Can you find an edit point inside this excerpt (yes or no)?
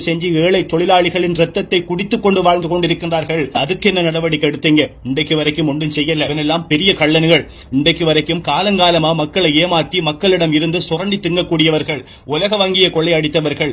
yes